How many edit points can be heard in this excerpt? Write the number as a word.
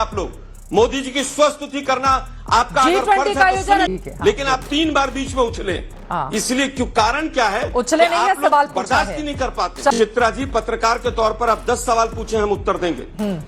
two